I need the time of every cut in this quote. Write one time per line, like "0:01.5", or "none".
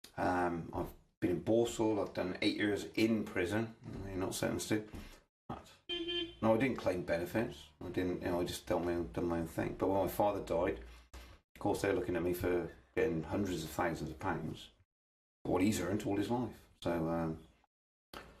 none